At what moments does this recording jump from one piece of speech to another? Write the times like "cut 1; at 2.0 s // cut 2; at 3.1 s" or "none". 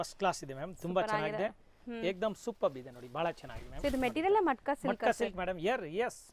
none